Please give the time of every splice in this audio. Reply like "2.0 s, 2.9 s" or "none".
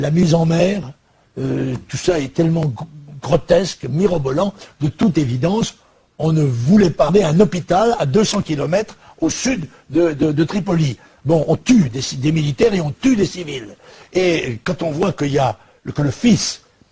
none